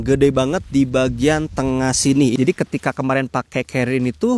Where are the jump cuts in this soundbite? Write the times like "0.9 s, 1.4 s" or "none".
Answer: 2.3 s